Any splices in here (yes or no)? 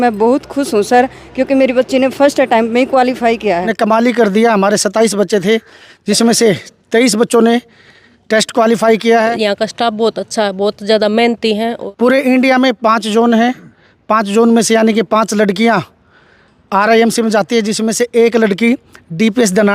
yes